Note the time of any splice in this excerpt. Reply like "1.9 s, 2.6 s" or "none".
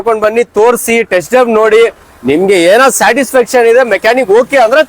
none